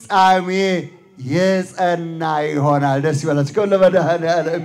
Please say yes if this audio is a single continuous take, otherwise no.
yes